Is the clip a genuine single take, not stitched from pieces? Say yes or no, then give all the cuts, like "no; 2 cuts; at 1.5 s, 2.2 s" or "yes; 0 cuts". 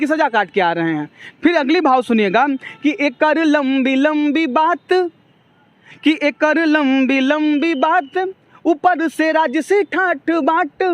yes; 0 cuts